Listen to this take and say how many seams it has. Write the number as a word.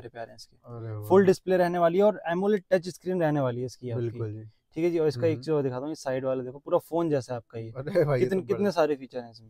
zero